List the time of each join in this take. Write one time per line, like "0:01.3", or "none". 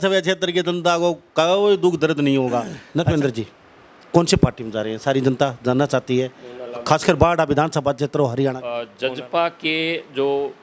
0:02.8
0:08.9